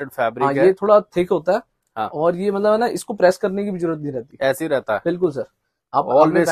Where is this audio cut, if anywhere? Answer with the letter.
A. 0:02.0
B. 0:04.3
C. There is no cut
C